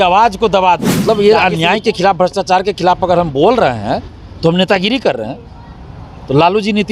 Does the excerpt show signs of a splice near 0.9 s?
yes; 1 cut; at 0.9 s

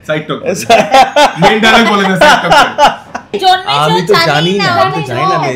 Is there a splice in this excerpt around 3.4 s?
yes; 1 cut; at 3.4 s

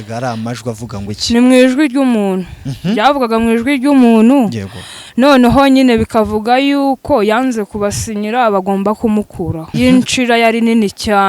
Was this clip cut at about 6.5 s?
no; 1 cut; at 9.6 s

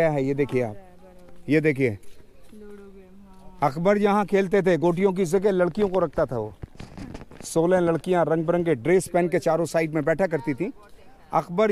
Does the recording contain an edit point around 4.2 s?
no; 0 cuts

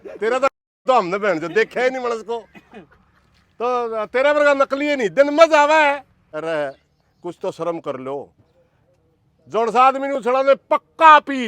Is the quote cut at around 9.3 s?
no; 1 cut; at 6.2 s

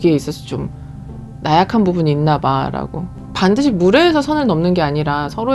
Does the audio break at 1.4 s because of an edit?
no; 1 cut; at 3.2 s

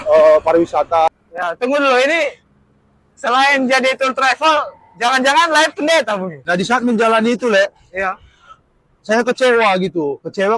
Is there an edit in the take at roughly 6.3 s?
yes; 2 cuts; at 1.1 s, 6.3 s

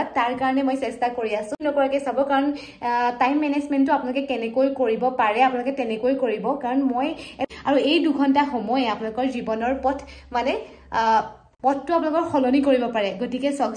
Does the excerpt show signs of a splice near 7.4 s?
yes; 2 cuts; at 1.5 s, 7.4 s

